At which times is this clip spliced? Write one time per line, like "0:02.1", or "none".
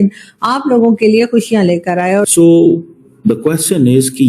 0:02.2

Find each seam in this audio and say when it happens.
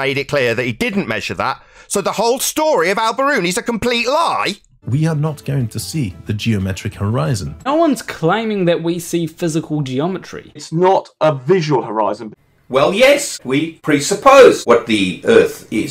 0:04.9
0:07.7
0:10.6
0:12.3
0:13.6
0:14.6

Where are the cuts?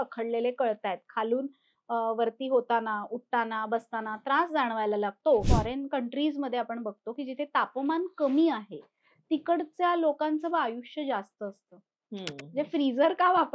0:05.5

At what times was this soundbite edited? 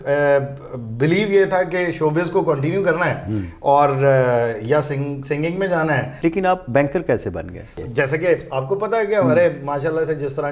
0:06.1
0:07.8

